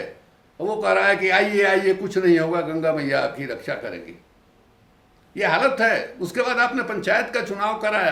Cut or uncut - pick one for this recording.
uncut